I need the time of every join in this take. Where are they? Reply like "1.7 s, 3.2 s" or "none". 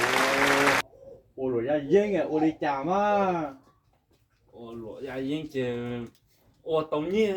none